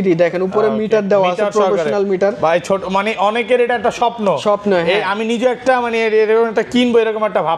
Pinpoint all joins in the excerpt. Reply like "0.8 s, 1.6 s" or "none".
none